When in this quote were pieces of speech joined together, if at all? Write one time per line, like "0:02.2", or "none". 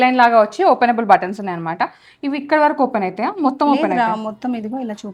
none